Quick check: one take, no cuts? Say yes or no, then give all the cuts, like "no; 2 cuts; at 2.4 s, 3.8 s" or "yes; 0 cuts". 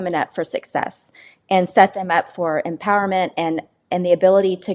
yes; 0 cuts